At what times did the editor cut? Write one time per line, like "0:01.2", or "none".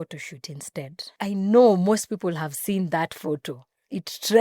0:01.2